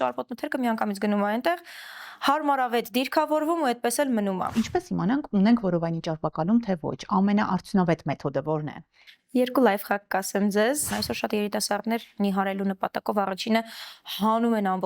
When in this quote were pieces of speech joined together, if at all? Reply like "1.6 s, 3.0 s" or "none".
4.5 s, 10.8 s